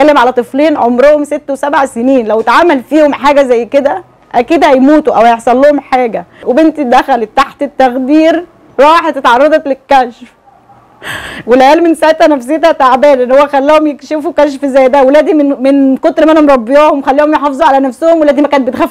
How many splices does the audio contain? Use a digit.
1